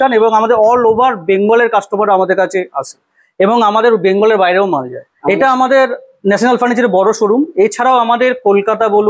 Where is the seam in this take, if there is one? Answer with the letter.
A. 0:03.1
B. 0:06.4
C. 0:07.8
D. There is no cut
D